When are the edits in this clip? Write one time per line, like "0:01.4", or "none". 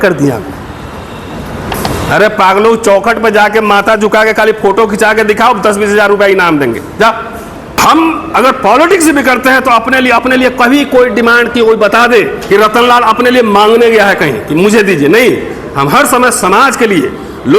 0:07.8
0:12.4